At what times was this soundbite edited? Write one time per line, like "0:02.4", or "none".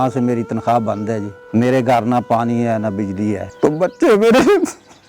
0:01.3
0:03.5

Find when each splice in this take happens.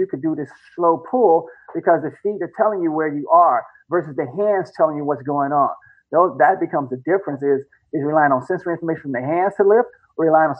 none

